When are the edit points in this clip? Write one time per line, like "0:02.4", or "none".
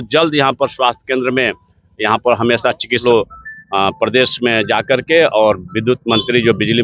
0:03.0